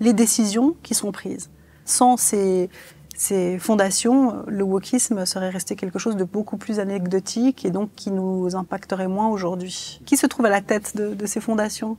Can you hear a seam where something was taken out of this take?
yes; 2 cuts; at 1.9 s, 9.9 s

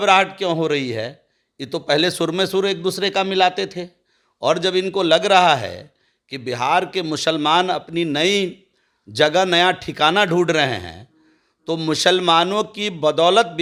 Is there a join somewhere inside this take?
no; 0 cuts

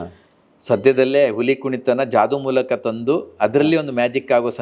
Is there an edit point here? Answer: no; 0 cuts

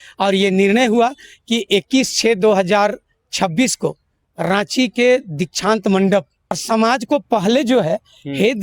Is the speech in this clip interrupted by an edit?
yes; 1 cut; at 6.6 s

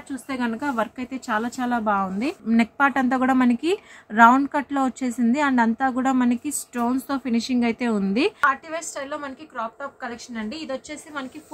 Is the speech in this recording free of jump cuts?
no; 2 cuts; at 2.4 s, 8.4 s

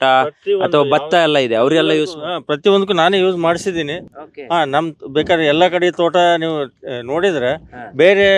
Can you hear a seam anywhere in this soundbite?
no; 0 cuts

